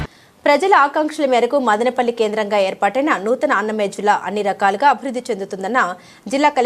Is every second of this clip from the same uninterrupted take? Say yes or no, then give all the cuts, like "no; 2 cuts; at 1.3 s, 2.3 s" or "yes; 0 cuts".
yes; 0 cuts